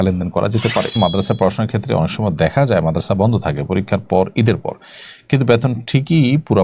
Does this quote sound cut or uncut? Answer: cut